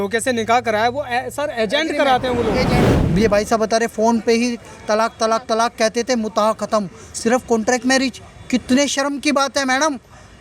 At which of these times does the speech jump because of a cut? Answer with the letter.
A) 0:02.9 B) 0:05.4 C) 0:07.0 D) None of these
A